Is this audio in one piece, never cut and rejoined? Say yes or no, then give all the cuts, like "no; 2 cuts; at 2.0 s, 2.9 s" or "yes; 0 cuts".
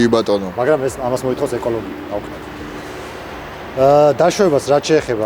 yes; 0 cuts